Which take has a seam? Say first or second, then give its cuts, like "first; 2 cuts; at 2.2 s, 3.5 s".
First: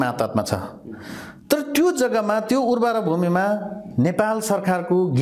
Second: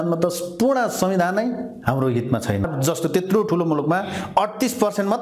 second; 1 cut; at 2.7 s